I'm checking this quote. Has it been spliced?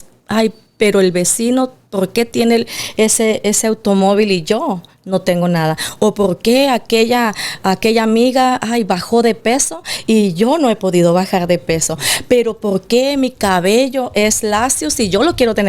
no; 0 cuts

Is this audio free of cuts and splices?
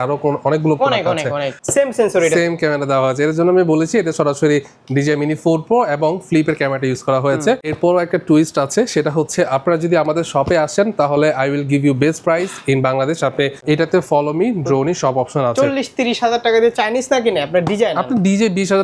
no; 3 cuts; at 1.6 s, 7.7 s, 13.6 s

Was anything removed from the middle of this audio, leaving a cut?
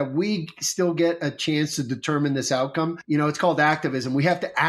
yes; 1 cut; at 3.0 s

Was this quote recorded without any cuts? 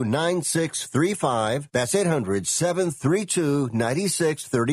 no; 1 cut; at 1.6 s

